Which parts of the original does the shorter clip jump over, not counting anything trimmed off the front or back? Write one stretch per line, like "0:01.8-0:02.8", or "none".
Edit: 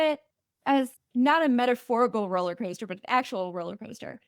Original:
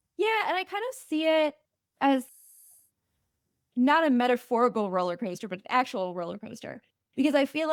0:02.3-0:03.6